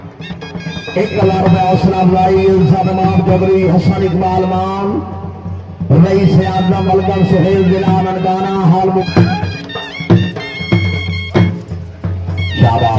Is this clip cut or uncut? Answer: uncut